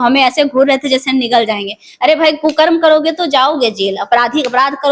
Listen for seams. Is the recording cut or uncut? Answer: uncut